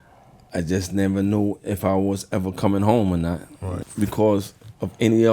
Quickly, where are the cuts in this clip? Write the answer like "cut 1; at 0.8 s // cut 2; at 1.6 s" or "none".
cut 1; at 3.8 s